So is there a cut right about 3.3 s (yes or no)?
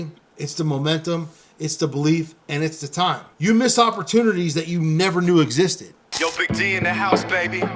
yes